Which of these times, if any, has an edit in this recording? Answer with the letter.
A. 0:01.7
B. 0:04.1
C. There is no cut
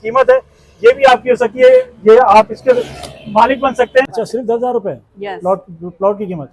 B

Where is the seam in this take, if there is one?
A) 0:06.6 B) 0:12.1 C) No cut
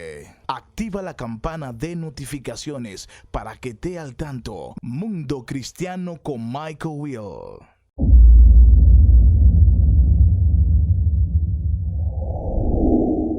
B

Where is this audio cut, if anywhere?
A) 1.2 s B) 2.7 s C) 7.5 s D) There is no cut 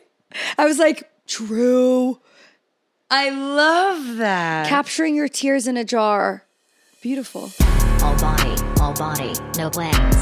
C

